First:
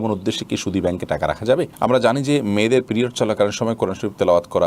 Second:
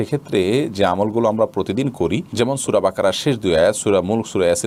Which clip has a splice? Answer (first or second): first